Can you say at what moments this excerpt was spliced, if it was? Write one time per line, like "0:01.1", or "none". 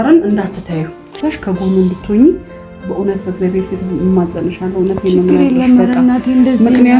0:01.1